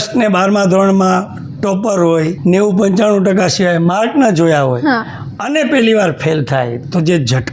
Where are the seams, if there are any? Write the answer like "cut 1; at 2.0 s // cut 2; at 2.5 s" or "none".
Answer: cut 1; at 2.4 s